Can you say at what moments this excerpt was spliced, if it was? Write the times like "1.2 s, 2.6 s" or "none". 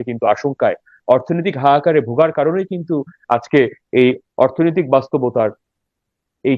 none